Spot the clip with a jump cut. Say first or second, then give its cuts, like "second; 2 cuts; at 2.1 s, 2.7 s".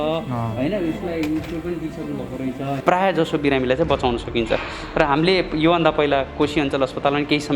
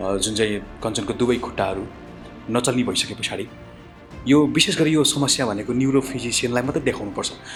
first; 1 cut; at 2.8 s